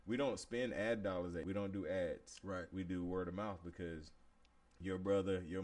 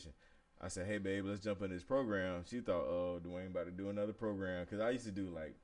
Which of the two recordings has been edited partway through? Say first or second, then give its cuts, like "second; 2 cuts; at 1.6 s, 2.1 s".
first; 1 cut; at 1.4 s